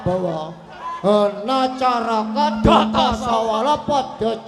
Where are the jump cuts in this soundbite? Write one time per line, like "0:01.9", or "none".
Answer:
none